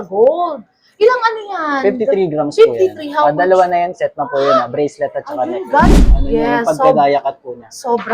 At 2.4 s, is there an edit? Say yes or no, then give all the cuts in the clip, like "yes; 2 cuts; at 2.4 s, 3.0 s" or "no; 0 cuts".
no; 1 cut; at 6.0 s